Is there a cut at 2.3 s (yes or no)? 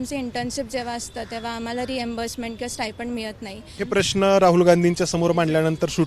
no